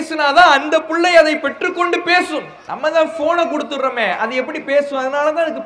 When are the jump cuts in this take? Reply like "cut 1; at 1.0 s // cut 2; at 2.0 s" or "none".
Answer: cut 1; at 2.6 s